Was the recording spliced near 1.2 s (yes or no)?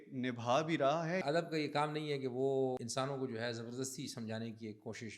yes